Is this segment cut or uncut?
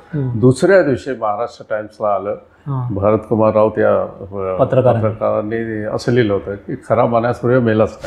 uncut